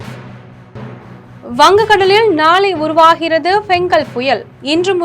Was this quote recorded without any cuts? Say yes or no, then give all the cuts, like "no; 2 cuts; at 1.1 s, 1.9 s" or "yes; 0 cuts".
no; 1 cut; at 1.0 s